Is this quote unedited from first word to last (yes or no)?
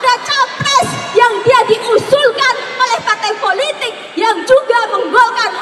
yes